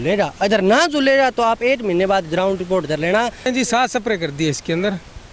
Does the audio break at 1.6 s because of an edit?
no; 1 cut; at 3.5 s

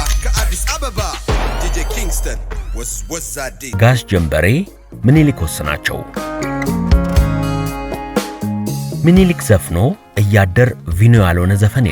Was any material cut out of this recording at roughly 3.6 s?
yes; 1 cut; at 3.6 s

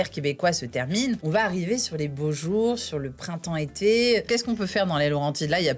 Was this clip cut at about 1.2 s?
yes; 2 cuts; at 1.2 s, 4.2 s

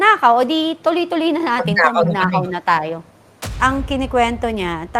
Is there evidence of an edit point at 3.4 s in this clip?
yes; 1 cut; at 3.4 s

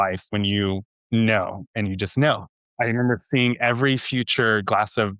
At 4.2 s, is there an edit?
no; 2 cuts; at 0.9 s, 2.6 s

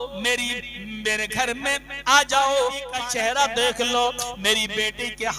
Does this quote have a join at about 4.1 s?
no; 1 cut; at 2.9 s

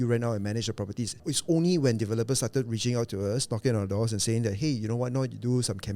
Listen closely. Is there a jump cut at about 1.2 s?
yes; 1 cut; at 1.2 s

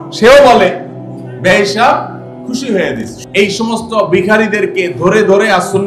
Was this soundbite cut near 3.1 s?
yes; 1 cut; at 3.1 s

